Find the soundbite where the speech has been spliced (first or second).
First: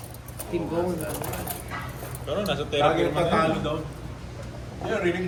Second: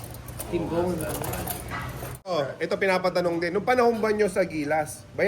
second